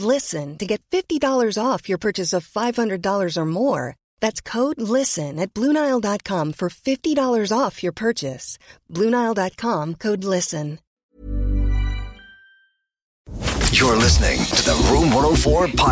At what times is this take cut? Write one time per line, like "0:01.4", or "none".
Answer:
0:13.3